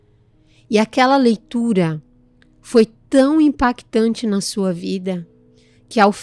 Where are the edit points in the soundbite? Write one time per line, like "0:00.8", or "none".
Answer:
none